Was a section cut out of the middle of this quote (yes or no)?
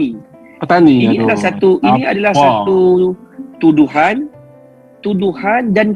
no